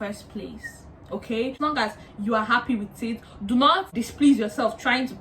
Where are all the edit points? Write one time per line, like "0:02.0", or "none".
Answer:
0:01.6
0:04.0